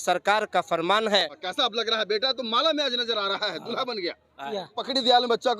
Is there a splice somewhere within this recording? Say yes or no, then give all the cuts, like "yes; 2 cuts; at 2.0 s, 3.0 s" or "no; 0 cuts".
yes; 2 cuts; at 1.4 s, 4.5 s